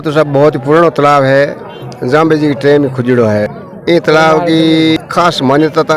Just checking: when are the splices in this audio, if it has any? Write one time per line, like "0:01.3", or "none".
none